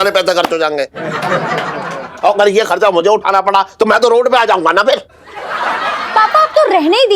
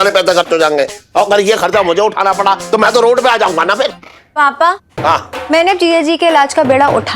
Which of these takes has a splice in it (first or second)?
second